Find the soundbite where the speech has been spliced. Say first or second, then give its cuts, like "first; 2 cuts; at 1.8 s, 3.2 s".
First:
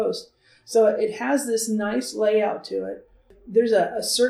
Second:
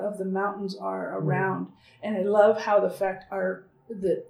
first; 1 cut; at 3.3 s